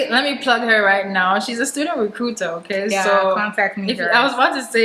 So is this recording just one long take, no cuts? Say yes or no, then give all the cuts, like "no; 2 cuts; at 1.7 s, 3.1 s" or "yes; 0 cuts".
yes; 0 cuts